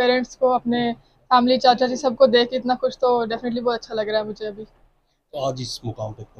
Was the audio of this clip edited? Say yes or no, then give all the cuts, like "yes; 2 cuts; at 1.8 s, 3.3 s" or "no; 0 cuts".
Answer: no; 0 cuts